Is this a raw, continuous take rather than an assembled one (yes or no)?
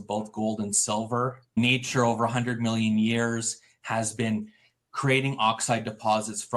no